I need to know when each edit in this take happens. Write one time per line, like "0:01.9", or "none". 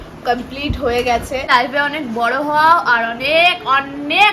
0:01.5